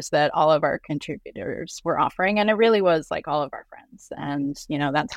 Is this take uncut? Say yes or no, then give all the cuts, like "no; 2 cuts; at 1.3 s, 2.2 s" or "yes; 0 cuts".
no; 2 cuts; at 1.7 s, 4.0 s